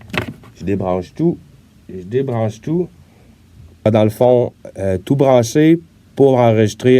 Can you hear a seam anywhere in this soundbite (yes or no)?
yes